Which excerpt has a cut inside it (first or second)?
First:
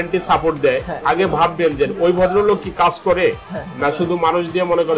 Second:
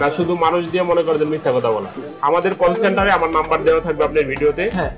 second